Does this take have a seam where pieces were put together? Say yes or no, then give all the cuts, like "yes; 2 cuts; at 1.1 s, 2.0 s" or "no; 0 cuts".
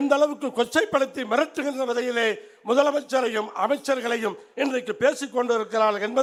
no; 0 cuts